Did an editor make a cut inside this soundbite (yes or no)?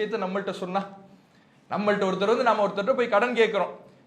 no